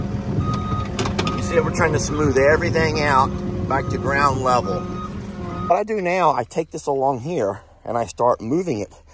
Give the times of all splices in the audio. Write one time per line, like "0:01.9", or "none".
0:05.7

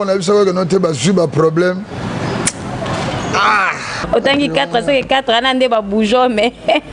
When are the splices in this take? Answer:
0:04.0

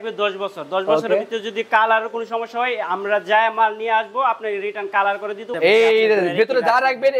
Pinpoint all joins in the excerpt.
0:05.5

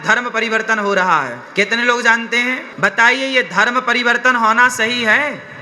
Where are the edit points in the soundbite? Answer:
0:01.4
0:02.7

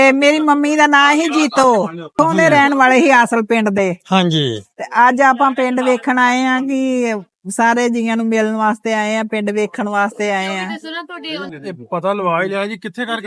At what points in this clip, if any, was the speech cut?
0:02.1
0:11.4

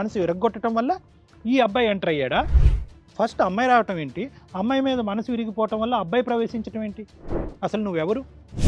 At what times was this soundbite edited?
0:02.6

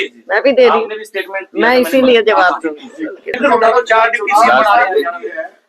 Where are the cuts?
0:03.2

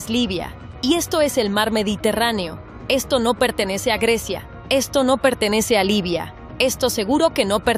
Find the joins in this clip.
none

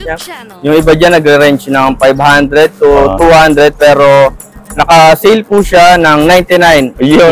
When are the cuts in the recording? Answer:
none

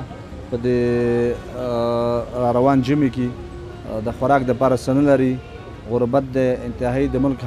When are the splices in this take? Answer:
none

